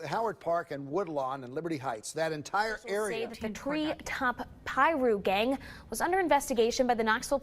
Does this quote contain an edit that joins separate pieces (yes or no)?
yes